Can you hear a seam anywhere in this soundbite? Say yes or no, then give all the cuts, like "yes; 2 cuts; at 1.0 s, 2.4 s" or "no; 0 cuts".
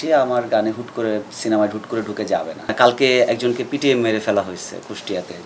yes; 1 cut; at 2.7 s